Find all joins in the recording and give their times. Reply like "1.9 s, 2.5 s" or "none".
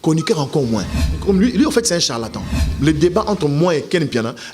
1.1 s, 2.6 s

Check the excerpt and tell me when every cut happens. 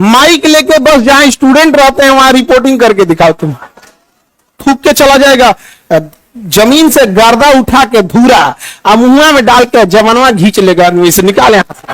4.6 s

